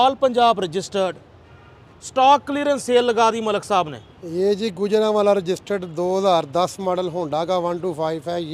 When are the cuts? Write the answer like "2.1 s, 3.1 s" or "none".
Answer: none